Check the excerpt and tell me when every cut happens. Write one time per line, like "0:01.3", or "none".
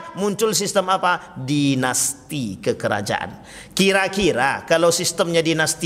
none